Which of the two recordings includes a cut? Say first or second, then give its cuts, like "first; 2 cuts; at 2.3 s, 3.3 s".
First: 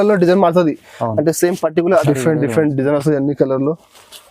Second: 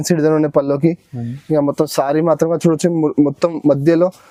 first; 1 cut; at 2.0 s